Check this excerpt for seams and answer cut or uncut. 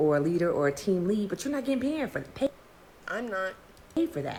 uncut